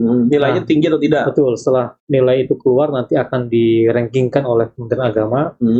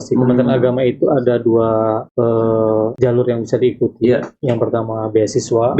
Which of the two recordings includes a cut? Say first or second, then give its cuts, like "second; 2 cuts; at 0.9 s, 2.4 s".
second; 2 cuts; at 2.1 s, 2.9 s